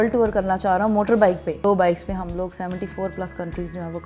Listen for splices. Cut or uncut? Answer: cut